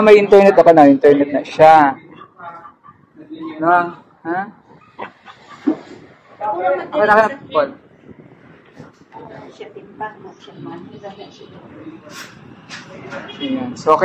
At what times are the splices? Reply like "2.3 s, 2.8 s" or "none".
none

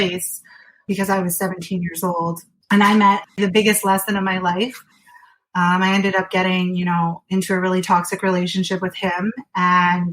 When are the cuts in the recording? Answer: 0.8 s, 2.5 s, 3.2 s

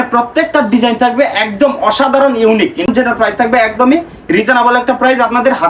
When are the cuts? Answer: 2.9 s

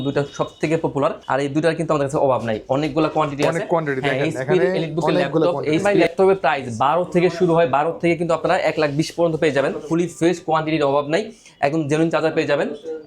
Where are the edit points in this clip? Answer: 1.2 s, 5.8 s, 9.8 s

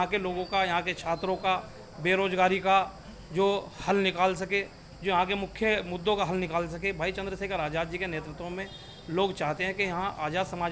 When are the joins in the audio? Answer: none

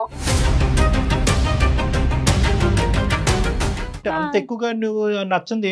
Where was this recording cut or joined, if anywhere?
4.0 s

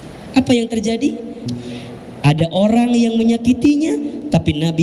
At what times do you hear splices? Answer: 1.4 s

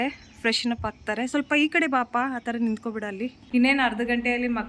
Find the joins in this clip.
3.4 s

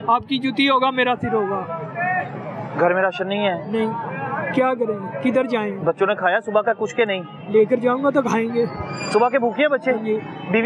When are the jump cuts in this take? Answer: none

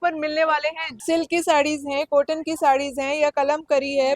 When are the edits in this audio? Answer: 1.0 s

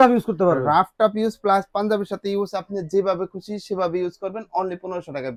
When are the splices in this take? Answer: none

